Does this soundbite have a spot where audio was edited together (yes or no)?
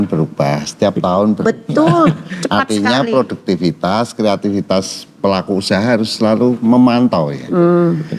no